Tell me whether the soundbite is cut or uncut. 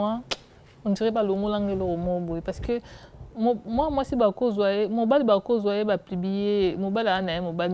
uncut